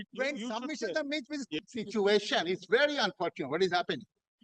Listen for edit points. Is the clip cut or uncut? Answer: cut